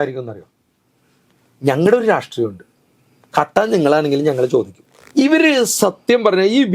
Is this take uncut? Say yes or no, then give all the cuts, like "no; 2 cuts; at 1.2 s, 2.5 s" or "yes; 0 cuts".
no; 1 cut; at 4.8 s